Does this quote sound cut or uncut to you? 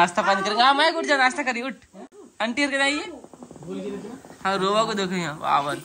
uncut